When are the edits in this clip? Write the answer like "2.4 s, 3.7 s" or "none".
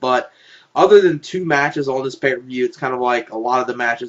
3.1 s

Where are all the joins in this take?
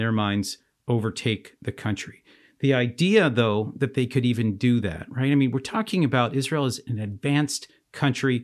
none

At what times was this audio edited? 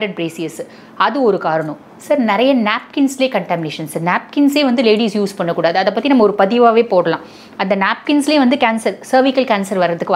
none

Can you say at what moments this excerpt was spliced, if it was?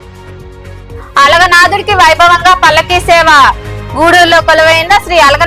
1.0 s

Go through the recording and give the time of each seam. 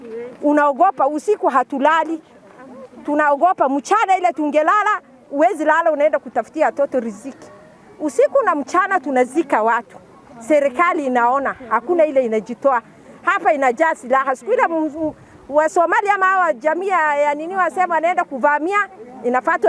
none

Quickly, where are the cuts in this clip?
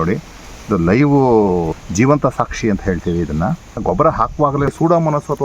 1.7 s, 3.8 s, 4.7 s

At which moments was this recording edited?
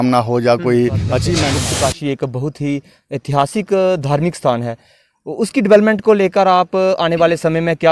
1.5 s

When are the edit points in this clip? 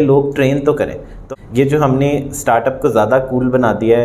1.1 s

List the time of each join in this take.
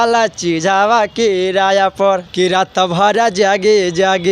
2.3 s

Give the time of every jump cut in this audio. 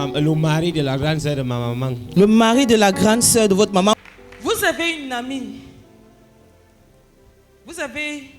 4.0 s

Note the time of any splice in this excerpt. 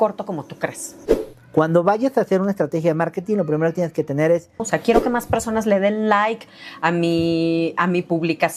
1.0 s, 4.6 s

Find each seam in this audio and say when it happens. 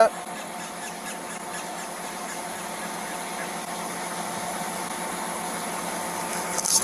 none

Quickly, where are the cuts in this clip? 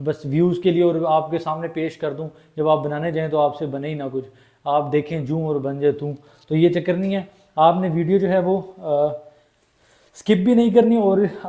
none

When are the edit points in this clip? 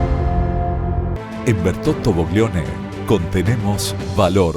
1.2 s

